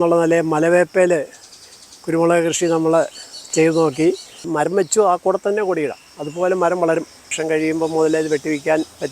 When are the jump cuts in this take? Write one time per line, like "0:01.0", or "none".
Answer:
0:04.4
0:07.4